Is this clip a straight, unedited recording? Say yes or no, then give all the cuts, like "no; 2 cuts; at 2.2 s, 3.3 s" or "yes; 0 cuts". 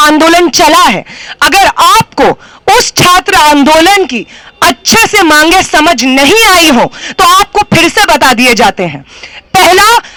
yes; 0 cuts